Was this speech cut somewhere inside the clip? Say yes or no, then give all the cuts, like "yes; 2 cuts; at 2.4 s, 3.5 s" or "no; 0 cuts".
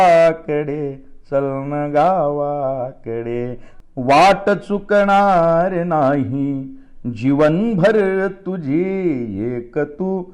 yes; 1 cut; at 3.7 s